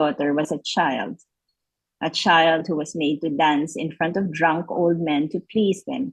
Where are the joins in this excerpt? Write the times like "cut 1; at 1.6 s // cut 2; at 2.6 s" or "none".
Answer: none